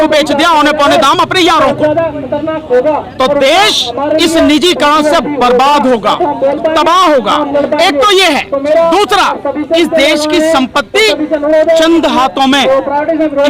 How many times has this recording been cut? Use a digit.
0